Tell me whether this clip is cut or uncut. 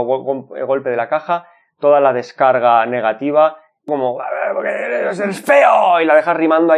cut